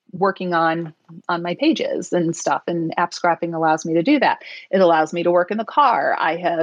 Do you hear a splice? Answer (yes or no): no